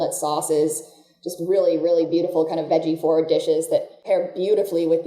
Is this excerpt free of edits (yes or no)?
no